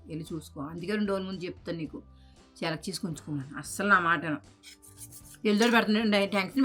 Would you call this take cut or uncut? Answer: uncut